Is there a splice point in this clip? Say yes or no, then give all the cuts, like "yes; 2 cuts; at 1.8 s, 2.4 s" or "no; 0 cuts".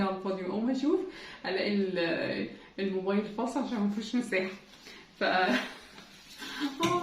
yes; 1 cut; at 5.5 s